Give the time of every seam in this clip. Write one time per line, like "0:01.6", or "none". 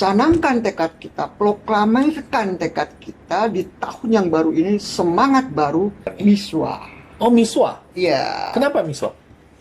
0:06.1